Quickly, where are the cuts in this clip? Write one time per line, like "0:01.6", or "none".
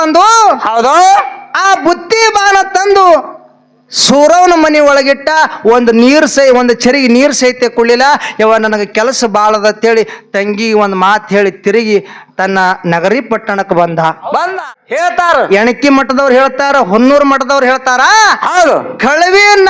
0:14.8